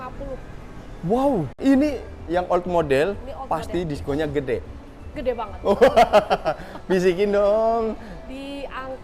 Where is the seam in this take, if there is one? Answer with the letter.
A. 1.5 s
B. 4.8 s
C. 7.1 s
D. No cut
A